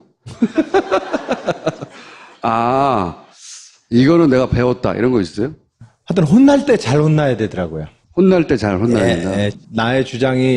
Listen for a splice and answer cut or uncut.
cut